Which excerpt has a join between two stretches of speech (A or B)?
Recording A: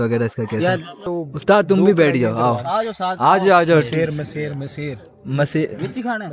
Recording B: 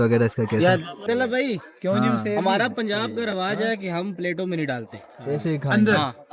B